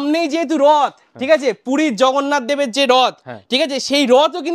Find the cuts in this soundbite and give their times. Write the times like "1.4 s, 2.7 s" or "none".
none